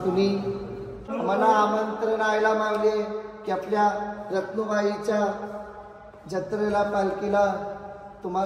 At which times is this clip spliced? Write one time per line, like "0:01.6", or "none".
0:01.1